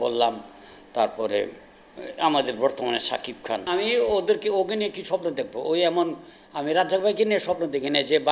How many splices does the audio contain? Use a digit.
1